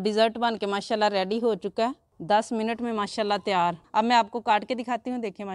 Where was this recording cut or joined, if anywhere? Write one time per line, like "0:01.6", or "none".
0:02.1
0:03.8